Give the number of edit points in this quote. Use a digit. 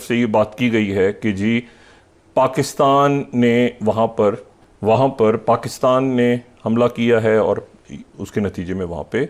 0